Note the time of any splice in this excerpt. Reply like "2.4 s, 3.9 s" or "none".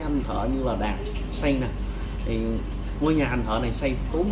none